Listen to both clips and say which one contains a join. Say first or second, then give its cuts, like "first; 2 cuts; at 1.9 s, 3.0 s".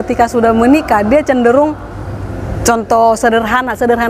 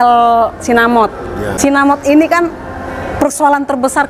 second; 1 cut; at 1.5 s